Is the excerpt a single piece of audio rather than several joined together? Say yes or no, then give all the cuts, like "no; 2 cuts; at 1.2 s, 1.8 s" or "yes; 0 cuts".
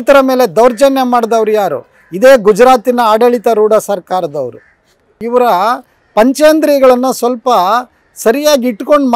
no; 1 cut; at 5.2 s